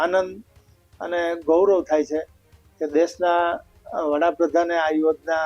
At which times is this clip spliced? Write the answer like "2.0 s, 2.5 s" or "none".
none